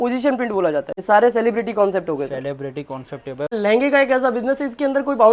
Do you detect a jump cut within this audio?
yes; 2 cuts; at 0.9 s, 3.5 s

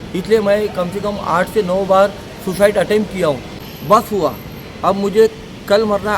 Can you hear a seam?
yes; 1 cut; at 3.6 s

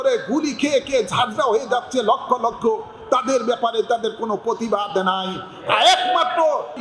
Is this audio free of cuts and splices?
yes; 0 cuts

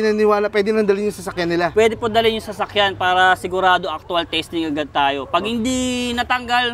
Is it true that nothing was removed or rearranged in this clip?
yes; 0 cuts

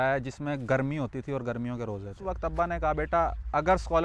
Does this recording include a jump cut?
yes; 1 cut; at 2.2 s

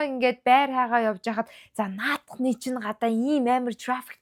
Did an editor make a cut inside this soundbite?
no; 0 cuts

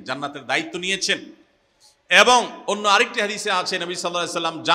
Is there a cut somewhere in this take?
no; 0 cuts

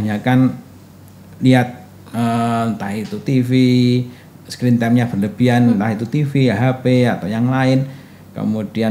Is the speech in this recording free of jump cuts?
yes; 0 cuts

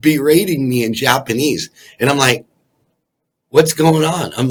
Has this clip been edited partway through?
no; 0 cuts

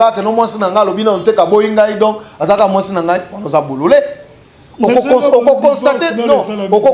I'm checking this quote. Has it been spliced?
no; 0 cuts

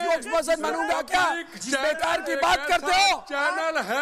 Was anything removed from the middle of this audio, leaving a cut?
no; 0 cuts

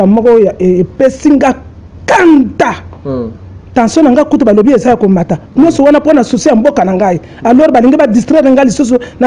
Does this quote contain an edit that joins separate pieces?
no; 0 cuts

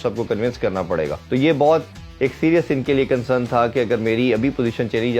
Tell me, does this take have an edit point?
yes; 1 cut; at 1.2 s

